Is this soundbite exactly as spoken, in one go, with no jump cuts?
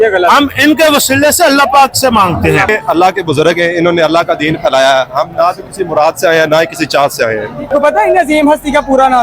no; 2 cuts; at 2.7 s, 7.7 s

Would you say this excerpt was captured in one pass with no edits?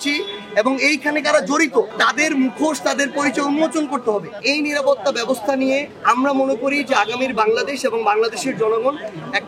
no; 3 cuts; at 1.9 s, 4.4 s, 5.9 s

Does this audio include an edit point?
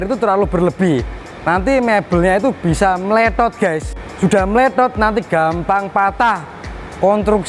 no; 0 cuts

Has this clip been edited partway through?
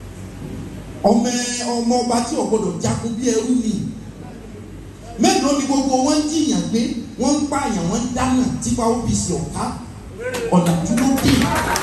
no; 0 cuts

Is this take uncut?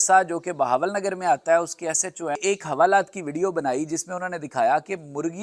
no; 1 cut; at 2.4 s

